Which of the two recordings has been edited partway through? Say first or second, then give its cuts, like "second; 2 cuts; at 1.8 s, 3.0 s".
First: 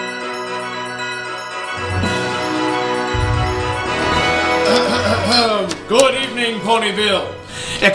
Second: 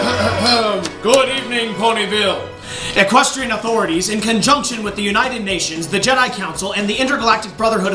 first; 1 cut; at 3.8 s